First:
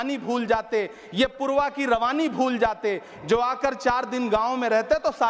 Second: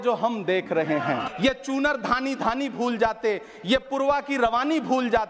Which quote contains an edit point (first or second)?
second